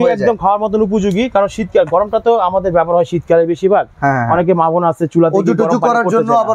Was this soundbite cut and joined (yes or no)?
no